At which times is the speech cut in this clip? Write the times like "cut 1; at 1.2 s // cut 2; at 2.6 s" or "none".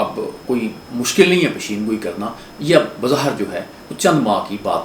none